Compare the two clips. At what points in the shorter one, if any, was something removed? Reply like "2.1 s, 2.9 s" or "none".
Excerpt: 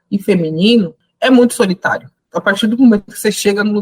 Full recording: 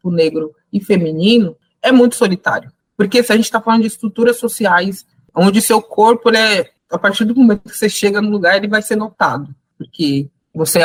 2.2 s